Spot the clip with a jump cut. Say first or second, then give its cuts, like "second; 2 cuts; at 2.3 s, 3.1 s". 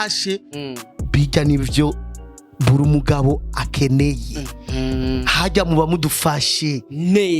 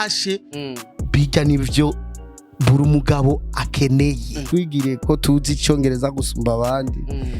second; 1 cut; at 4.5 s